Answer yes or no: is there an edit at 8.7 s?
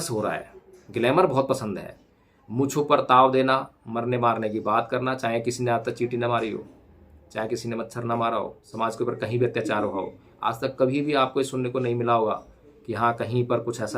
yes